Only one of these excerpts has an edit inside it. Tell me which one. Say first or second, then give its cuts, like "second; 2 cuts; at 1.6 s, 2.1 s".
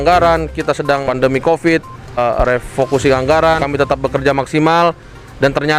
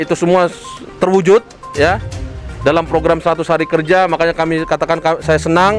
first; 3 cuts; at 1.0 s, 2.2 s, 3.6 s